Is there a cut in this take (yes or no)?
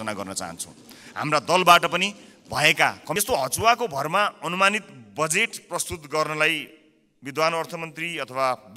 yes